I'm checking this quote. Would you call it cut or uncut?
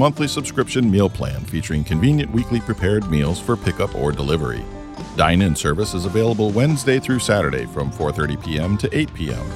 uncut